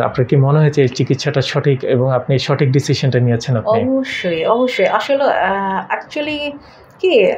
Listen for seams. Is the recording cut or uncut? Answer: uncut